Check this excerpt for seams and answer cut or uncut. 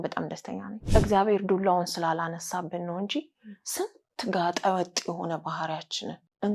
uncut